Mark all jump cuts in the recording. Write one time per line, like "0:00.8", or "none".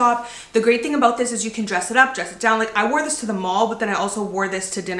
none